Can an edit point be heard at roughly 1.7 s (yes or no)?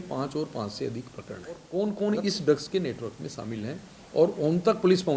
yes